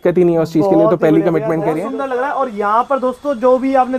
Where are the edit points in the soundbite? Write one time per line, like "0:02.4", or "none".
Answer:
0:01.8